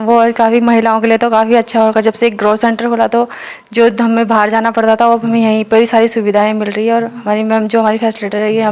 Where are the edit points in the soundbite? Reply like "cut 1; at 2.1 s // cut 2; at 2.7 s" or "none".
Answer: none